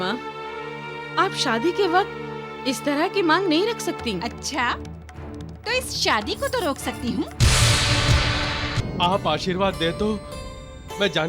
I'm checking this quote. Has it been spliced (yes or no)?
yes